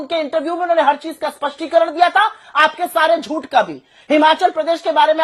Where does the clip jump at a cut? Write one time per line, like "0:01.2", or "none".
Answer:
none